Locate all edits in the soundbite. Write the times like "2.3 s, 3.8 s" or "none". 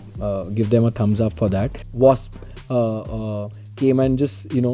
1.8 s

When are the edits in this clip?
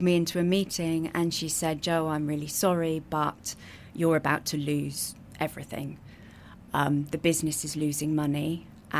none

